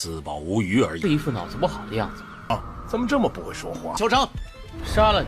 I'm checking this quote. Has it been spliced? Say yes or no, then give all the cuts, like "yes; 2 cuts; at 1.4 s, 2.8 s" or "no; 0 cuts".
yes; 1 cut; at 1.0 s